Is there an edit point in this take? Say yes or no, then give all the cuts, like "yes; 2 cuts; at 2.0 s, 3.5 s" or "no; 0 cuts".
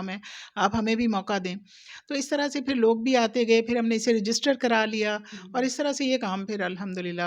no; 0 cuts